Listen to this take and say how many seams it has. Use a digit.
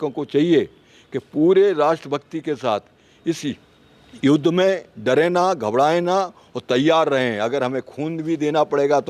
0